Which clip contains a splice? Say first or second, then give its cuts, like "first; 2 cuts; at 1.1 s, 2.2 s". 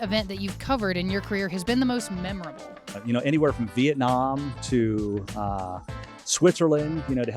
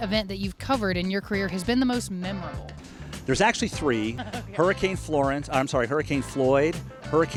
first; 1 cut; at 2.9 s